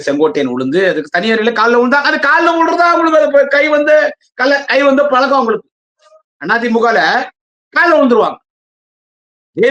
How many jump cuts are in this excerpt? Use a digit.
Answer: 0